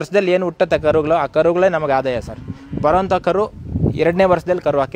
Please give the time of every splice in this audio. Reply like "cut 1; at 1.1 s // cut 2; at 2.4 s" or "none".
none